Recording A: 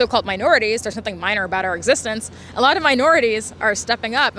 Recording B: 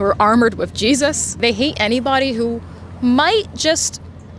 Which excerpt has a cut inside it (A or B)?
B